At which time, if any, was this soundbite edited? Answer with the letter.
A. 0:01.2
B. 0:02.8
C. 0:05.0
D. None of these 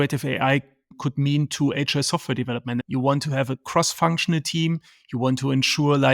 B